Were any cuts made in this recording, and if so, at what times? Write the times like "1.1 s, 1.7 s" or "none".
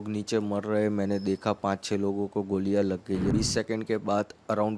3.3 s